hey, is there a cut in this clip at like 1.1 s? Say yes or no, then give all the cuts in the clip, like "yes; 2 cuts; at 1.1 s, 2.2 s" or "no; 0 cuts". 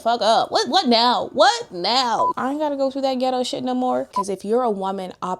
no; 2 cuts; at 2.3 s, 4.2 s